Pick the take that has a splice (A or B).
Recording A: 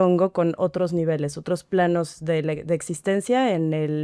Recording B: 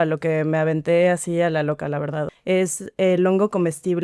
B